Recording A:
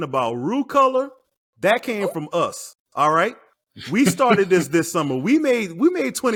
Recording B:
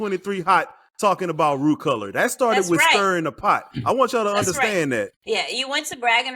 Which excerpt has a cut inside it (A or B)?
B